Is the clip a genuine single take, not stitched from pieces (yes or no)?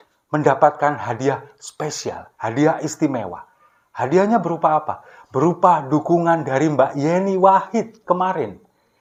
yes